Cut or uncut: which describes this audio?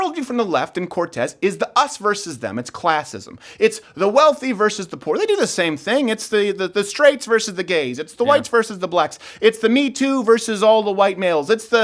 uncut